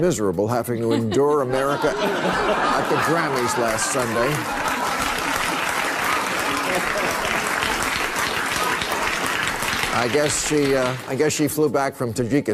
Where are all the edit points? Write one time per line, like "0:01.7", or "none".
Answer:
none